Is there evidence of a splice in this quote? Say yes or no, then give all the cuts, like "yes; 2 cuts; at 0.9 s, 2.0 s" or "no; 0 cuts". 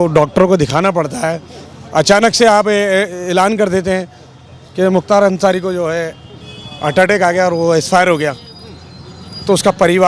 no; 0 cuts